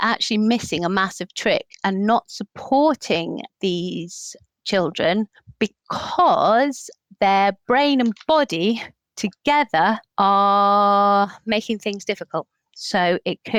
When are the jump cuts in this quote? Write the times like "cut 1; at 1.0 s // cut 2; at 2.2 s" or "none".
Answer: none